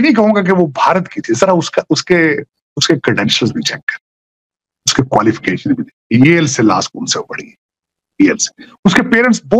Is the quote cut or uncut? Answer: uncut